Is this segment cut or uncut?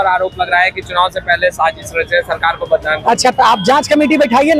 uncut